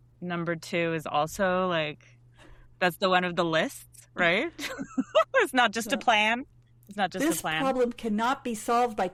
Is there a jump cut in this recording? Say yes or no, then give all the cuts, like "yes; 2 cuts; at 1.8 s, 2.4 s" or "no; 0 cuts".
no; 0 cuts